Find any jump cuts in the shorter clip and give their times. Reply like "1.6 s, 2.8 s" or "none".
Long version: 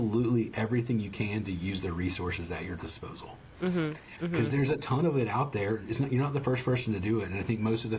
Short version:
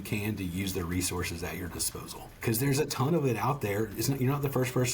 2.5 s